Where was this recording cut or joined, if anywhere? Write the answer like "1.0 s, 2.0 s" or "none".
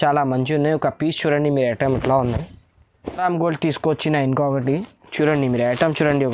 3.2 s